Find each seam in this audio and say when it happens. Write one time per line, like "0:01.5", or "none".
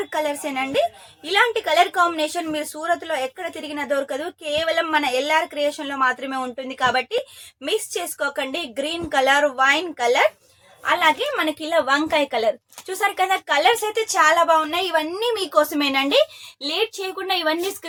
none